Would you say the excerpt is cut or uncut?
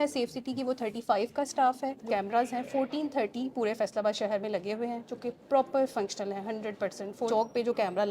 cut